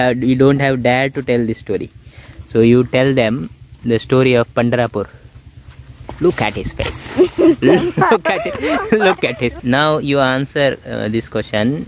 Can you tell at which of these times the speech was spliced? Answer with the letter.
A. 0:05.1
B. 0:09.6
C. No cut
B